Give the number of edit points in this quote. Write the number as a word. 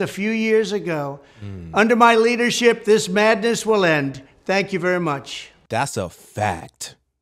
zero